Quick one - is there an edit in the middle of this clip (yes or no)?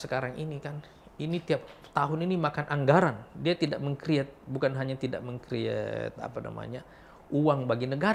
no